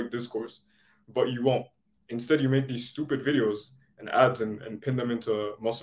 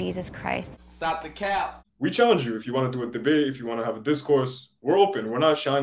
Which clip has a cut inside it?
second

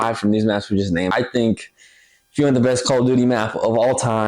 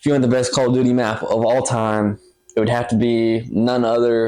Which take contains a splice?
first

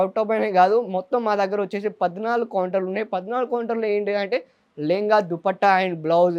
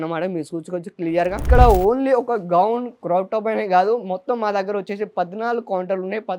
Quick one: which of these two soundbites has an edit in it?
second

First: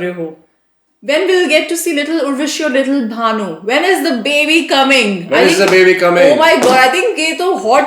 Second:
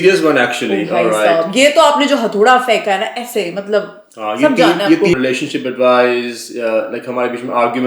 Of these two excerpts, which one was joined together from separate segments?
second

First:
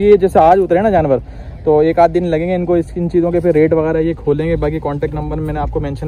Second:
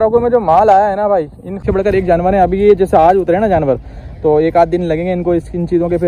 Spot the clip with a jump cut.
second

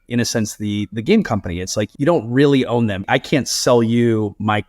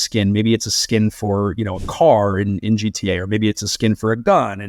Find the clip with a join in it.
first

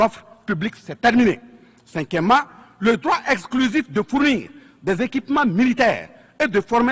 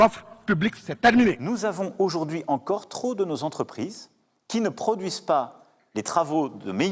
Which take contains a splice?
second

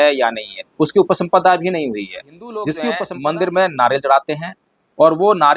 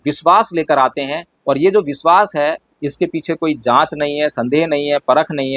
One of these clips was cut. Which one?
first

